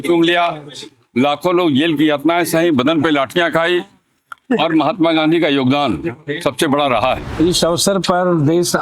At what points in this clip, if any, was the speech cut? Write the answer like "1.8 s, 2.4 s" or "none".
7.3 s

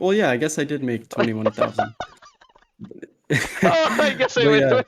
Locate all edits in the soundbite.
none

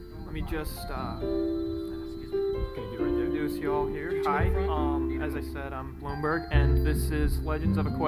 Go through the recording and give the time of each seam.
1.1 s

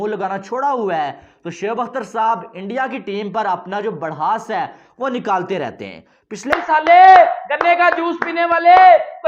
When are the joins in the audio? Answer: 6.5 s

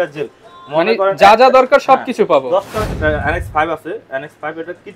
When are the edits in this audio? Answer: 2.9 s

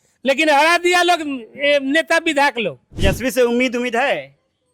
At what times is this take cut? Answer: 2.9 s

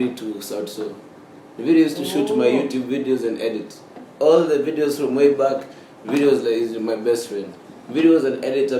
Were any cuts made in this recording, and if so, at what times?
none

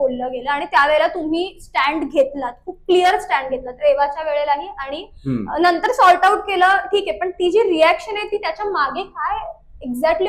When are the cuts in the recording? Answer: none

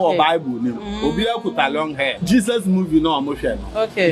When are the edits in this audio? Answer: 2.2 s

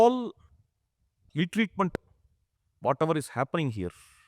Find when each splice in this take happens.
1.2 s

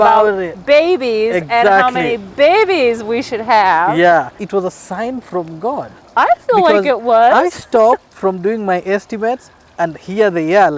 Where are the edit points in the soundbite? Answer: 4.4 s

